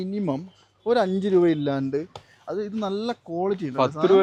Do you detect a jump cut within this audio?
no; 0 cuts

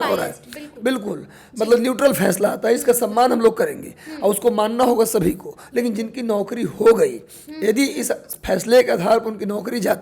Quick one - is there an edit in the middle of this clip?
no; 0 cuts

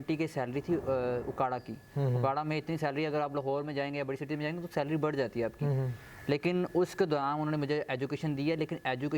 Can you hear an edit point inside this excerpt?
no; 0 cuts

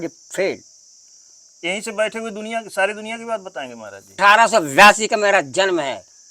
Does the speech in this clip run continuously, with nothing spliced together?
no; 1 cut; at 4.2 s

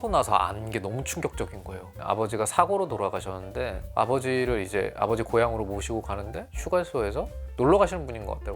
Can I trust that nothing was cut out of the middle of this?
no; 1 cut; at 2.0 s

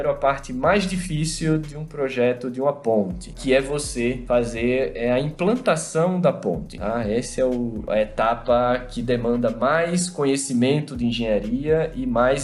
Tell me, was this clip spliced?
no; 0 cuts

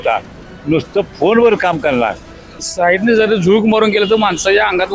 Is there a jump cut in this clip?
yes; 1 cut; at 2.6 s

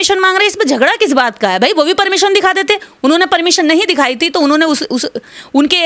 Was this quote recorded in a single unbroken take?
yes; 0 cuts

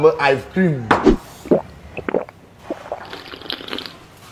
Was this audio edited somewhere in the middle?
yes; 1 cut; at 1.0 s

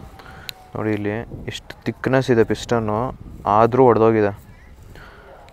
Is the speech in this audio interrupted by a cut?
no; 0 cuts

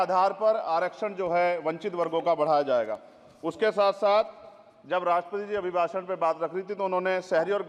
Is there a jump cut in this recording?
no; 0 cuts

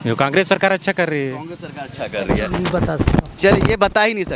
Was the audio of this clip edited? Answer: yes; 1 cut; at 2.5 s

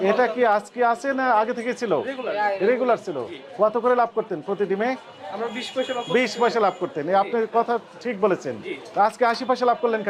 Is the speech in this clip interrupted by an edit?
no; 0 cuts

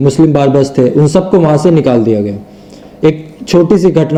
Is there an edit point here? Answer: no; 0 cuts

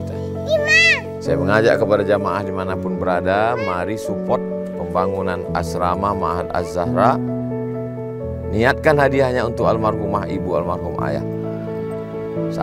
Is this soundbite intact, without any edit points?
yes; 0 cuts

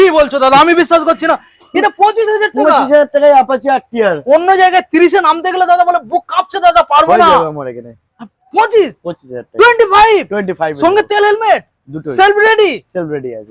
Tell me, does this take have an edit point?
no; 0 cuts

